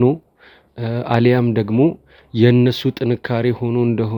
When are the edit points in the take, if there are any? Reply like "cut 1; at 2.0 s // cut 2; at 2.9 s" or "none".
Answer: none

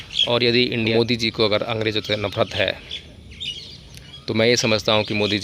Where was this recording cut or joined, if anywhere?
cut 1; at 0.9 s

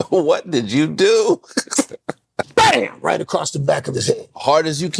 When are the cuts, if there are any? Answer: cut 1; at 2.4 s

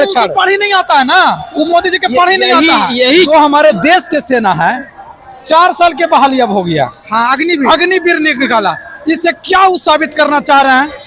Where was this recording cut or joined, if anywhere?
cut 1; at 3.3 s

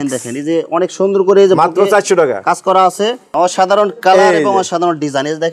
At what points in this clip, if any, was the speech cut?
cut 1; at 3.2 s

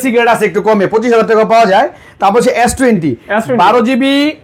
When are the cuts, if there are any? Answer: none

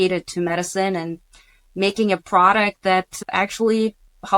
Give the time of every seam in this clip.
none

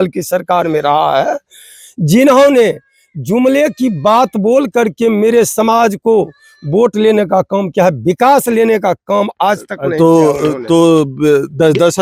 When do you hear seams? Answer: none

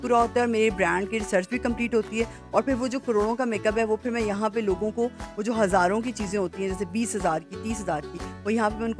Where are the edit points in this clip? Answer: none

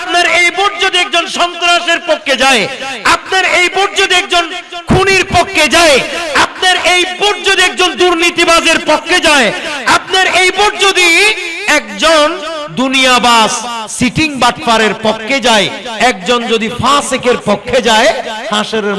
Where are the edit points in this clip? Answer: none

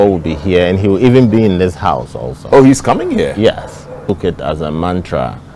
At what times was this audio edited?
cut 1; at 4.0 s

